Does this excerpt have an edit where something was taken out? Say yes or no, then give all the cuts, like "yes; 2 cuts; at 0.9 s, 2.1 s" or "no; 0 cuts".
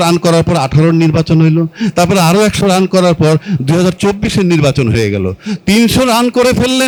no; 0 cuts